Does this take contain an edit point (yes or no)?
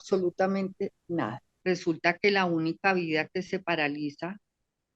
yes